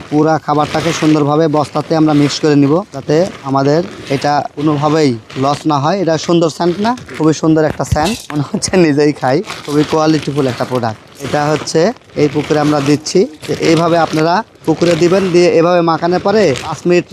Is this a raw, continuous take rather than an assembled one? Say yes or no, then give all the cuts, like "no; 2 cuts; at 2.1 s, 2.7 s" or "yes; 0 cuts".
yes; 0 cuts